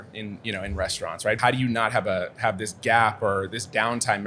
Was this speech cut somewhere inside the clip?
yes; 1 cut; at 1.4 s

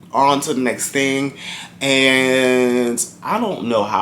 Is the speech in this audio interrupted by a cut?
no; 0 cuts

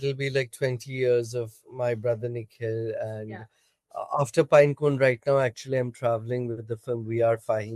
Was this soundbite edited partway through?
no; 0 cuts

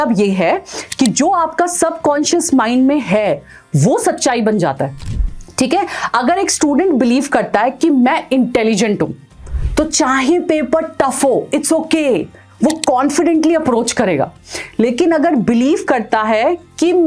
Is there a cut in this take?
no; 0 cuts

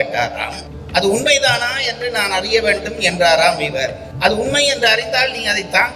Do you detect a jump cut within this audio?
no; 0 cuts

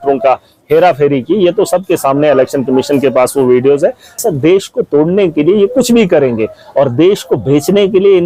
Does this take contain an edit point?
yes; 1 cut; at 4.2 s

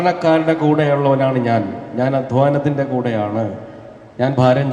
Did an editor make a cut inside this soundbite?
no; 0 cuts

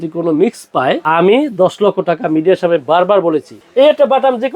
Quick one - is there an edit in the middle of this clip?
yes; 2 cuts; at 1.0 s, 3.6 s

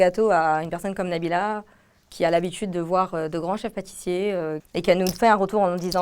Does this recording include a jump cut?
yes; 1 cut; at 4.6 s

